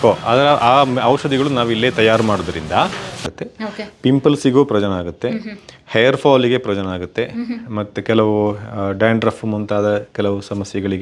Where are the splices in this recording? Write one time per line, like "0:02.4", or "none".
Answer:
0:03.2